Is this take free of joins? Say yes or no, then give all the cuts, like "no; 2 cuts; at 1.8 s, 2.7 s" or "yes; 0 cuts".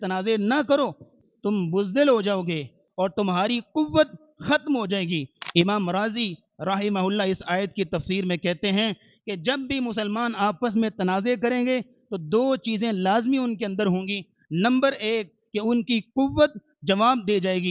no; 2 cuts; at 1.2 s, 2.8 s